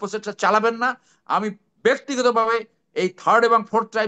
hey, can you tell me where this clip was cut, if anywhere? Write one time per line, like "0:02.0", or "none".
none